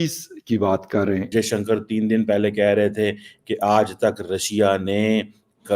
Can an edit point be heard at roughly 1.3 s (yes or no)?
yes